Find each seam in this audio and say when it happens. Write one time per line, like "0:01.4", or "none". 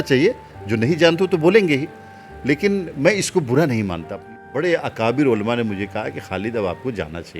0:04.4